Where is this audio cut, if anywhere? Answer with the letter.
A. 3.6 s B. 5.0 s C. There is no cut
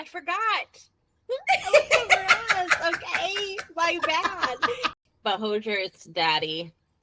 B